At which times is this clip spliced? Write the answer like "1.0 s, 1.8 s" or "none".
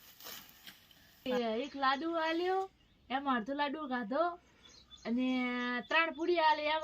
1.3 s